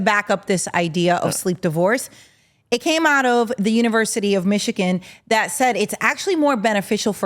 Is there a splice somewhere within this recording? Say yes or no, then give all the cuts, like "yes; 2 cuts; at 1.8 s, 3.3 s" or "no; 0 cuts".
no; 0 cuts